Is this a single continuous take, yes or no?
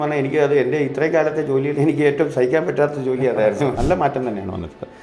no